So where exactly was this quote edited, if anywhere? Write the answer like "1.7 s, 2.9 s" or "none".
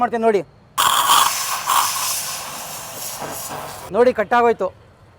0.7 s, 3.8 s